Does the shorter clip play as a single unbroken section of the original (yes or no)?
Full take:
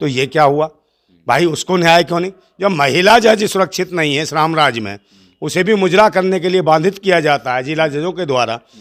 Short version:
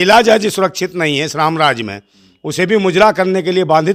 yes